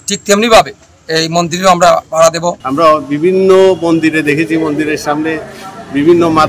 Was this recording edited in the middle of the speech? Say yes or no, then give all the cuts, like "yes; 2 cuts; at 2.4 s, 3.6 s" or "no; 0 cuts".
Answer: yes; 1 cut; at 2.6 s